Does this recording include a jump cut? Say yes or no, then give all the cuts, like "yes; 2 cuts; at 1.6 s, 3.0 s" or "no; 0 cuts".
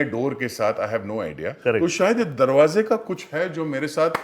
yes; 1 cut; at 1.5 s